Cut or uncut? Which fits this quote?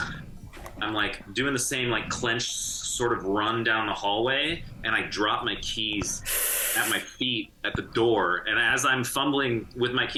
uncut